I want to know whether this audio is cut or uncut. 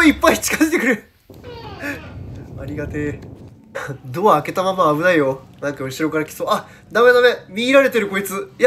cut